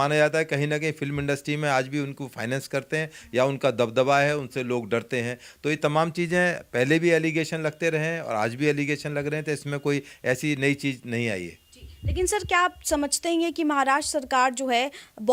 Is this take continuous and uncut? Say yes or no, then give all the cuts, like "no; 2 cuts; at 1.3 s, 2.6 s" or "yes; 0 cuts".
yes; 0 cuts